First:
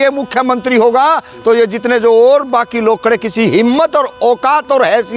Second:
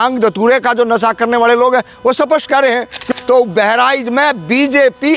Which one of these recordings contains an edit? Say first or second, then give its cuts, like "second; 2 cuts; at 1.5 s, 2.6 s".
second; 1 cut; at 3.0 s